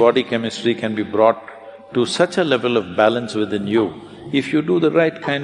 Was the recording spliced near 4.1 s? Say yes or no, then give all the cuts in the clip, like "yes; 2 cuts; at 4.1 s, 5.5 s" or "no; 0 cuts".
no; 0 cuts